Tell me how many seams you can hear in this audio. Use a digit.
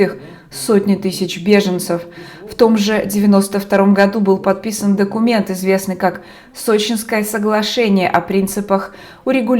0